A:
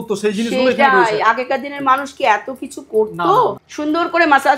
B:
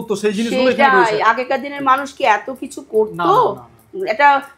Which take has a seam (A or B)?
A